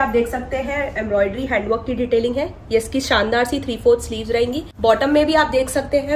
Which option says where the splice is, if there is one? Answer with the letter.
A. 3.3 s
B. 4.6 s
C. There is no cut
B